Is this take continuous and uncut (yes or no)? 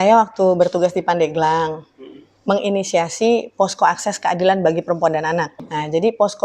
no